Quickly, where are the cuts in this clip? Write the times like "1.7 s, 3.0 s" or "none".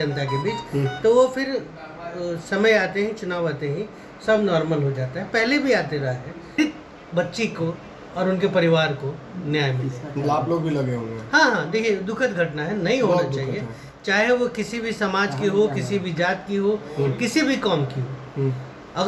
6.6 s